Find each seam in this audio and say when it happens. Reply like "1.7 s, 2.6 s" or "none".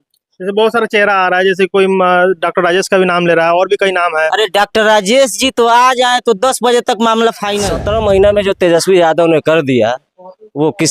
7.7 s